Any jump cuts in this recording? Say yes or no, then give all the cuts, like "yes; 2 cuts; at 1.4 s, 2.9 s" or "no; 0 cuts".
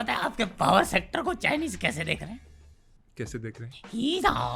no; 0 cuts